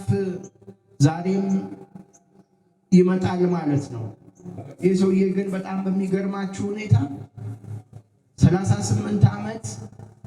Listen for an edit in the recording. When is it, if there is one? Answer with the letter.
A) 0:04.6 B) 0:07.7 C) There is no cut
A